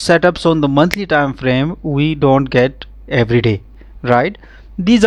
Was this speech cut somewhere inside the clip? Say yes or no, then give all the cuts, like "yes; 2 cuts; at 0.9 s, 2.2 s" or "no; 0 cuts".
no; 0 cuts